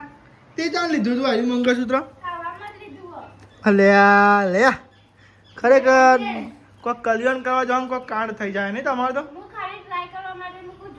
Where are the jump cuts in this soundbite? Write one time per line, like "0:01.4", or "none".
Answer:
none